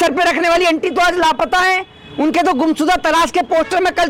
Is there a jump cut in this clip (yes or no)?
no